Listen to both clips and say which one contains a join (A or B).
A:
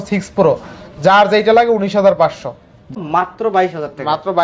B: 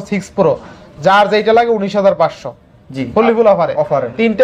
A